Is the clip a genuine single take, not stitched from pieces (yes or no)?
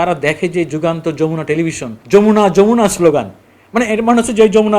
no